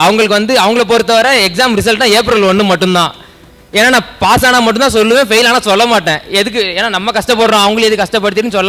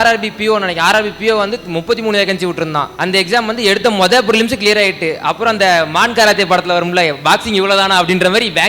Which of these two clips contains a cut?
second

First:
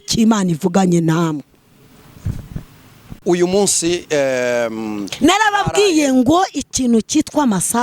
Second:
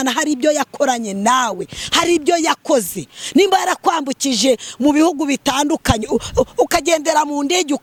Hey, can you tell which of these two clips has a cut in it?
first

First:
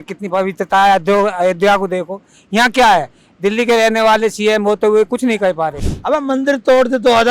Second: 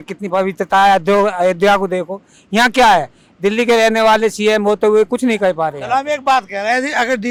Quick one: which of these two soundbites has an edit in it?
first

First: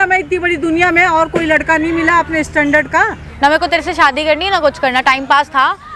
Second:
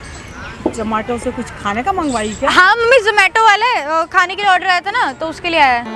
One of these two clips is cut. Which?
first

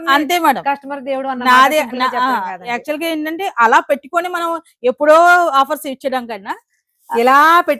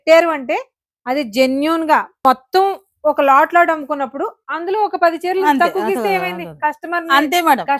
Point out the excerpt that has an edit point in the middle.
second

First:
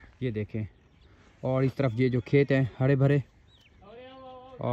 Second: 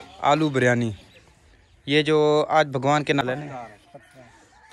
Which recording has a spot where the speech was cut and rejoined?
second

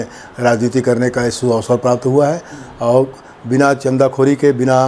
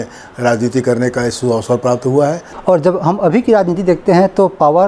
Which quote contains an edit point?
second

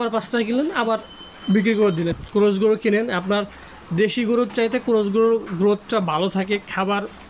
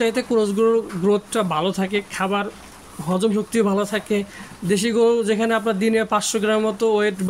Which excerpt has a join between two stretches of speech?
first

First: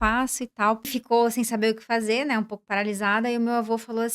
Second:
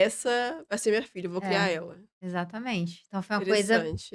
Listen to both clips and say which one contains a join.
first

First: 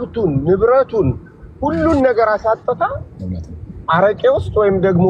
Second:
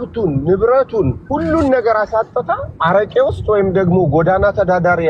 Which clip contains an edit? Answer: second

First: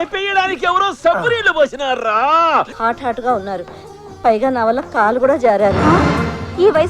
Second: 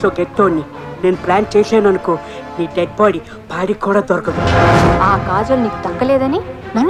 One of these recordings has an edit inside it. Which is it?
first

